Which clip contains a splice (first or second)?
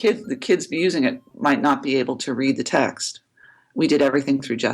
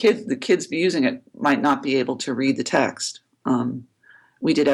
first